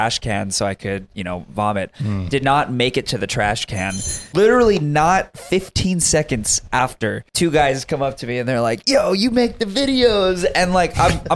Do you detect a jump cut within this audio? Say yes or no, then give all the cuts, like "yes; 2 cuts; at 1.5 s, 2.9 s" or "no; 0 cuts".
yes; 2 cuts; at 4.2 s, 7.2 s